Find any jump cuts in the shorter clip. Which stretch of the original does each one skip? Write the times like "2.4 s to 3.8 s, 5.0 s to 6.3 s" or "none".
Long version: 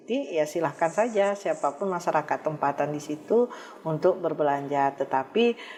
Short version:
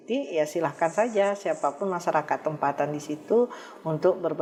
none

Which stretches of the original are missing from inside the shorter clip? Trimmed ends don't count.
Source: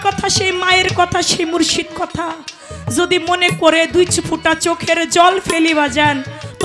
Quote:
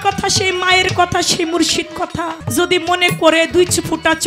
2.4 s to 2.8 s

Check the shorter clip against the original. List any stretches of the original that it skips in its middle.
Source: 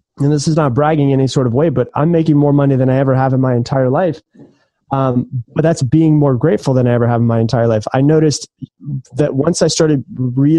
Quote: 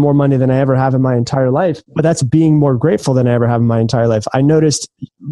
4.2 s to 5.4 s

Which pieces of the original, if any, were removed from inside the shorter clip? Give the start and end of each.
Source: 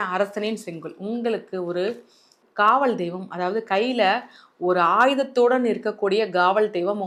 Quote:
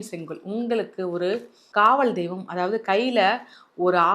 2.1 s to 2.4 s

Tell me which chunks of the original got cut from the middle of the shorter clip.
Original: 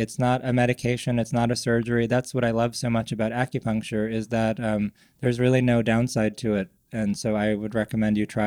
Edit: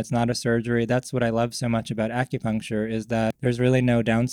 4.6 s to 5.2 s

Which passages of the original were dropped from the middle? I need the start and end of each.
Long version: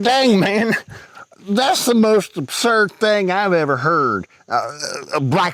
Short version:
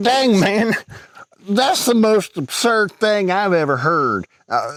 none

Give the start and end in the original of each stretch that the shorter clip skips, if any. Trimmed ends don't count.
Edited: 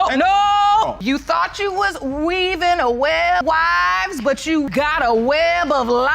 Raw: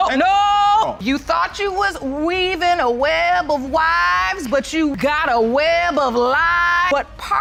3.4 s to 3.7 s

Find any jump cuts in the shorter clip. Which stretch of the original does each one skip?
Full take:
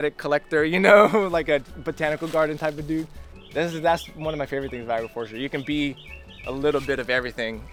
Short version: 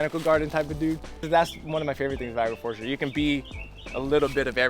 3.3 s to 3.7 s

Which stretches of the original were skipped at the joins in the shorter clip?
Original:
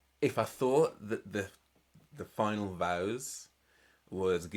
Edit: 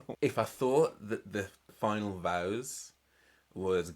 1.6 s to 2.2 s

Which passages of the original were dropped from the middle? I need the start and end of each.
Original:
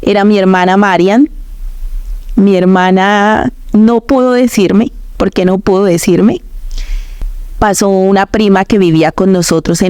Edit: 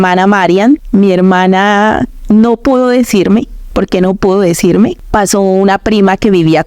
1.3 s to 2.3 s, 6.4 s to 7.5 s

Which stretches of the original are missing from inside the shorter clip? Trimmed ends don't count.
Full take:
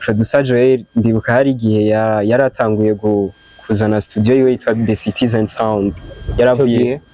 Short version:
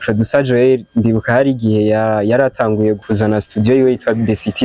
3.0 s to 3.6 s

